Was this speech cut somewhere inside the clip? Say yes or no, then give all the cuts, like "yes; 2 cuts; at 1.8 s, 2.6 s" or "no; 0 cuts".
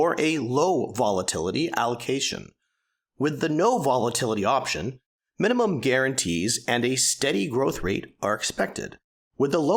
no; 0 cuts